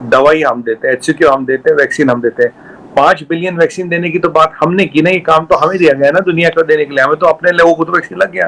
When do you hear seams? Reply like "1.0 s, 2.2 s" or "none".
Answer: none